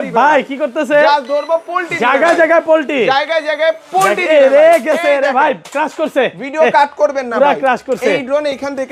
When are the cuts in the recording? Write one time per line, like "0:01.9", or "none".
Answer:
none

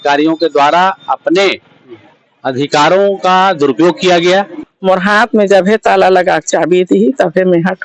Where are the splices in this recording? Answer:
0:04.7

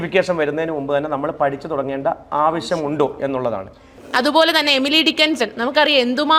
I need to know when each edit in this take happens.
0:04.0

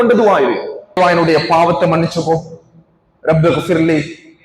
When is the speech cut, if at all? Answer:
0:01.0

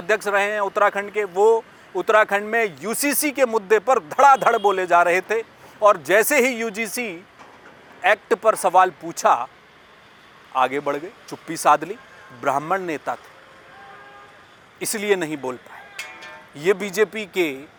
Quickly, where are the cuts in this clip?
none

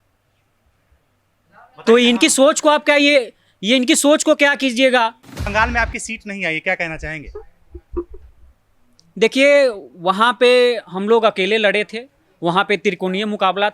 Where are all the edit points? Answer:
0:05.5

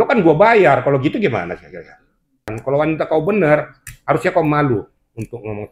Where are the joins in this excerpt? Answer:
0:02.6

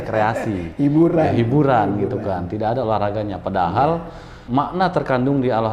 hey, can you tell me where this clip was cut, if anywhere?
0:04.4

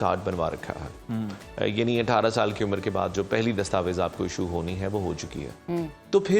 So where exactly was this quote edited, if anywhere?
none

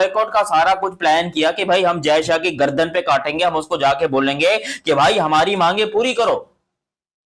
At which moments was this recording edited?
none

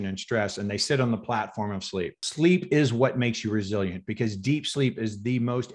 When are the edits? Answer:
0:02.2

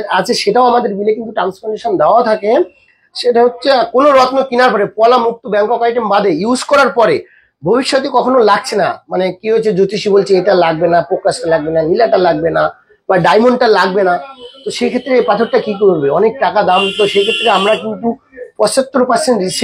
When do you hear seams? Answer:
none

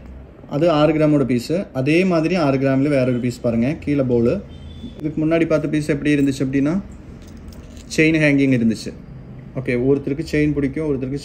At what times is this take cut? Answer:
none

